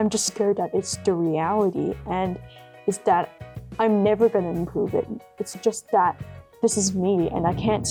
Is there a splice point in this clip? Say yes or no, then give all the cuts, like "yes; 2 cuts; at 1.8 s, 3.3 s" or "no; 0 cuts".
no; 0 cuts